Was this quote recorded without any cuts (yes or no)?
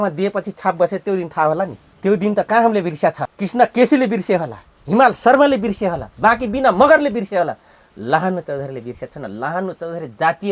no